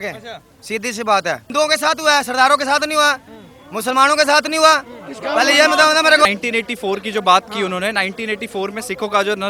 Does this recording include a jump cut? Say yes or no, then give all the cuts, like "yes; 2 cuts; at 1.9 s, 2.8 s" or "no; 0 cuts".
yes; 2 cuts; at 1.4 s, 6.2 s